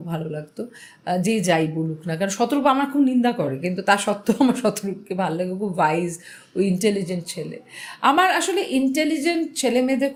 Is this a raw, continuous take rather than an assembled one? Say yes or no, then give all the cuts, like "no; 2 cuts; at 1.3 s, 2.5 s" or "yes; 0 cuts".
yes; 0 cuts